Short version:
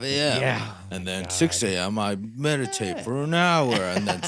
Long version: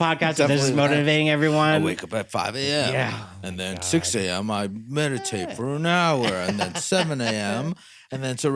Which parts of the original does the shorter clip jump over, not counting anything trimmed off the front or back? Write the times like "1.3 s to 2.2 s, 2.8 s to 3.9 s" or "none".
none